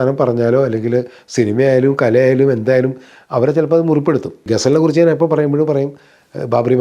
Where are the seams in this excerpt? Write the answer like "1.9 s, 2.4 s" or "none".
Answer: 4.5 s